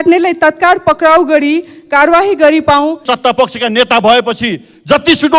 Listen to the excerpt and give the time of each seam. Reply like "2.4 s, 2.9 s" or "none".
3.1 s